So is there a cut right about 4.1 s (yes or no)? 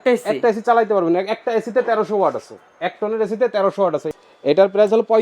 yes